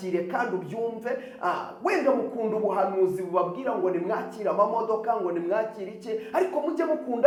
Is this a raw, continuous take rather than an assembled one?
yes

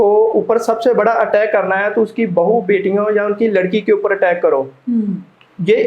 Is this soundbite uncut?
yes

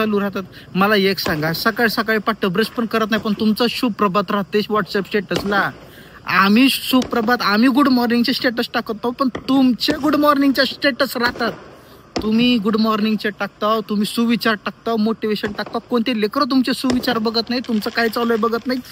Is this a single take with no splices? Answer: yes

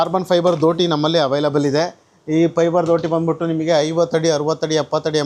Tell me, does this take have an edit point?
no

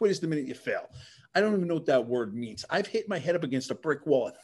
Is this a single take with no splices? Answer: yes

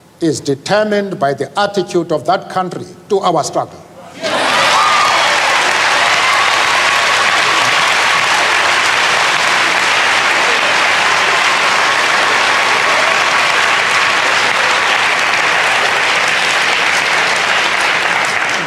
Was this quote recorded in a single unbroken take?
yes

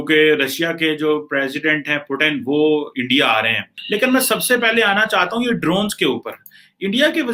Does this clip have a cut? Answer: no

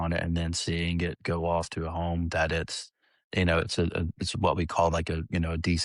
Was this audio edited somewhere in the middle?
no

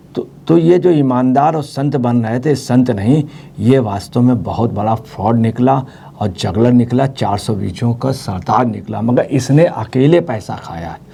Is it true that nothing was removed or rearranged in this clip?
yes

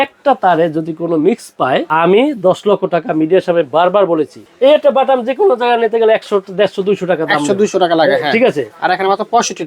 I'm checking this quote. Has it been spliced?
yes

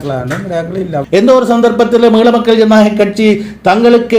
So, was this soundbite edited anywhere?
yes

